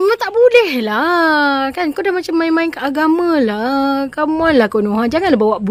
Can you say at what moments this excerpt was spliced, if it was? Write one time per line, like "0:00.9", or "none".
none